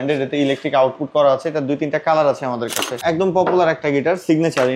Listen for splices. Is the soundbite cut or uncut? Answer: cut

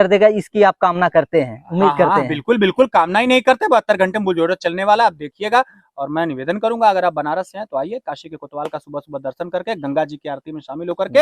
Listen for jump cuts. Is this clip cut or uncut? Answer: uncut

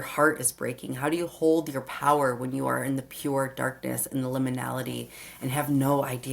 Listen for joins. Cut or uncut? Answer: uncut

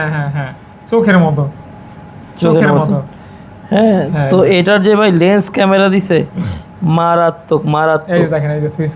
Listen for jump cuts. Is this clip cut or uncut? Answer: uncut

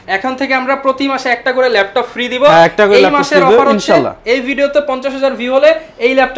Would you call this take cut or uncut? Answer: uncut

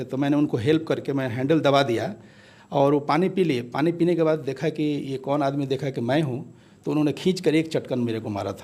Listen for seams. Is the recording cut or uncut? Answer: uncut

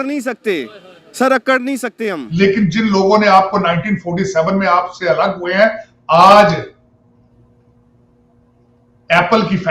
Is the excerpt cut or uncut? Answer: cut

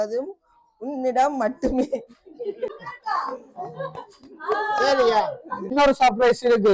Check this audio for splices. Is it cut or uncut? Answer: cut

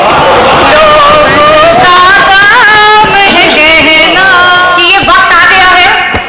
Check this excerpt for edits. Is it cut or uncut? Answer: cut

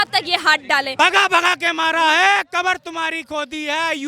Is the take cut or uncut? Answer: cut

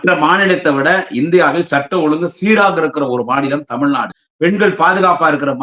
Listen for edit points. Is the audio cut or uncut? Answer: cut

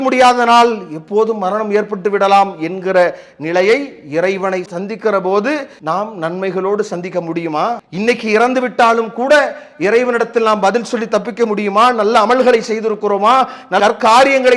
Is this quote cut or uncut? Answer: cut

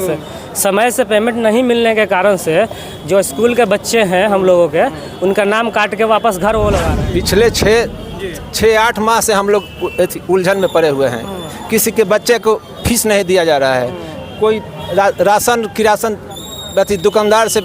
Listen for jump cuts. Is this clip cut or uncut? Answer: cut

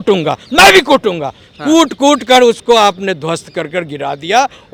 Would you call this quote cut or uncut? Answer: uncut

